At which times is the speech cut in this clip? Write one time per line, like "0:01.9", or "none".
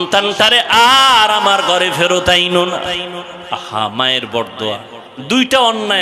none